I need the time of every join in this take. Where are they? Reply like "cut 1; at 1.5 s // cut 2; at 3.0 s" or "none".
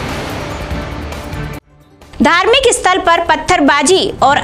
cut 1; at 1.7 s